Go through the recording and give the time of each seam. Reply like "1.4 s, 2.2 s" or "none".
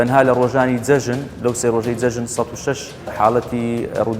3.1 s